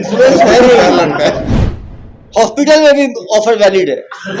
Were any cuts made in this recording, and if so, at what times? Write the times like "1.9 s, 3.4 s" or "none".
1.8 s